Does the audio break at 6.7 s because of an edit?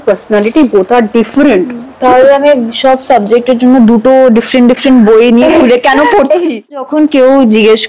yes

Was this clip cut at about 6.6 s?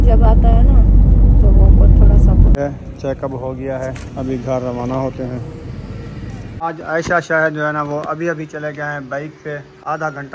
yes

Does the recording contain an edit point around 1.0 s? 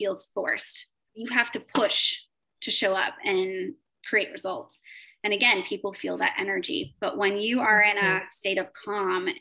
yes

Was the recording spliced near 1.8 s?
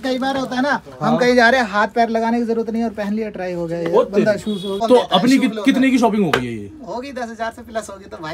no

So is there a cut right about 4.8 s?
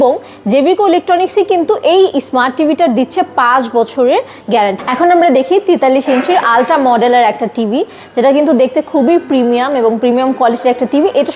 yes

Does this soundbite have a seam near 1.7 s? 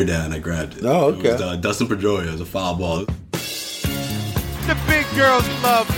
no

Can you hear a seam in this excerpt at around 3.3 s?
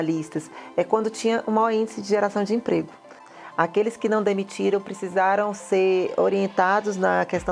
yes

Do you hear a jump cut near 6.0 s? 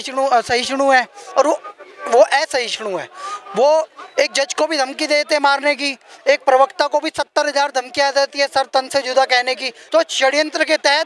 no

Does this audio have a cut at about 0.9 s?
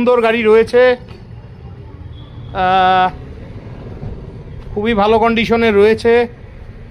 no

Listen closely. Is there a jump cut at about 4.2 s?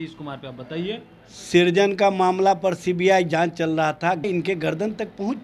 yes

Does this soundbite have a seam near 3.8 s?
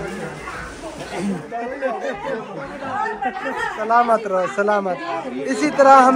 yes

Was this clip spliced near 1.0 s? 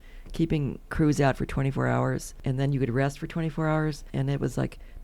no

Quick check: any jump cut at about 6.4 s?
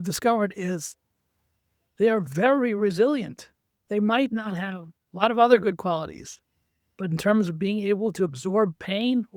no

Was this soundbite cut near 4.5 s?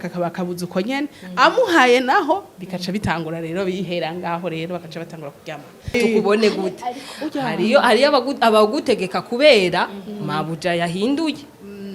no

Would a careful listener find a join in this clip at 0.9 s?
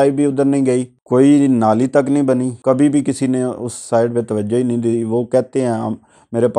yes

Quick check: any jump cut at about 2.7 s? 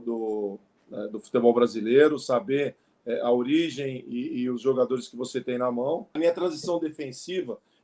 no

